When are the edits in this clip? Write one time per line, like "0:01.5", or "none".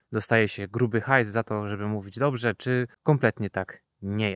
0:02.9